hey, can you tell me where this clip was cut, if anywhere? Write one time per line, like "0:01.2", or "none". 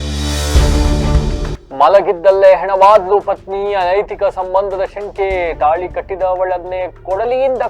none

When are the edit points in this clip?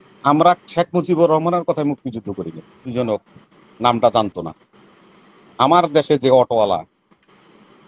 0:02.9

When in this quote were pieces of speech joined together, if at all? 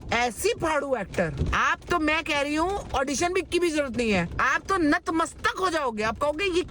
0:01.4

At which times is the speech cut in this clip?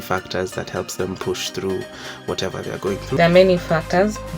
0:03.2

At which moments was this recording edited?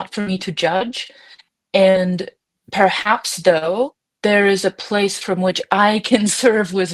0:04.0

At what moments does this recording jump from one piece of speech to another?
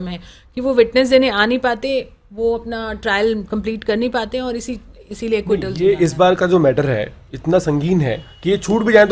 none

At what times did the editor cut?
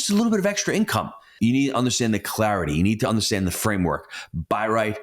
0:01.3

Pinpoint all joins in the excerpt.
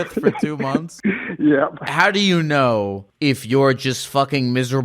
0:00.9
0:01.9
0:03.0

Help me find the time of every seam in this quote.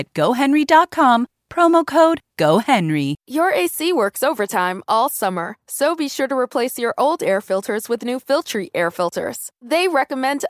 0:03.3

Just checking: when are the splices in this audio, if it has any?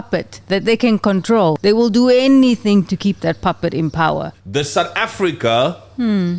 0:01.6
0:04.4

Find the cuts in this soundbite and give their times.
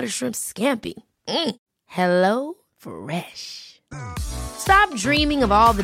none

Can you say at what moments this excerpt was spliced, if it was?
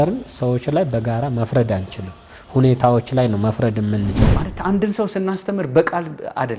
0:04.2

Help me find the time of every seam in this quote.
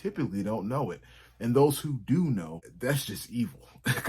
0:02.6

